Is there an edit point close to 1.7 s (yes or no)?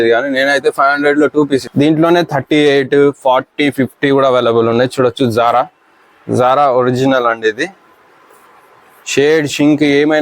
yes